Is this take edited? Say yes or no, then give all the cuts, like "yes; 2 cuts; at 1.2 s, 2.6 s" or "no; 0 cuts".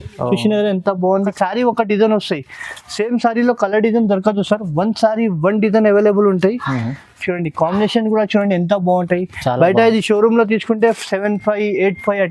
yes; 1 cut; at 1.3 s